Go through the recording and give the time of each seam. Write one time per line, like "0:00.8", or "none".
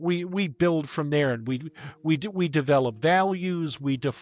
none